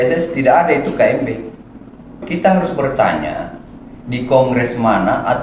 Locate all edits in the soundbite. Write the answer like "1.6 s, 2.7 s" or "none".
2.2 s